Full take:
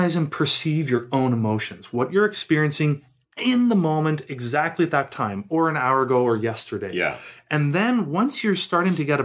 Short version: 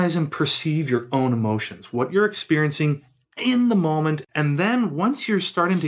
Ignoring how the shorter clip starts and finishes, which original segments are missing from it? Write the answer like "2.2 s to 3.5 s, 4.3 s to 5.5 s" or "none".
4.3 s to 7.4 s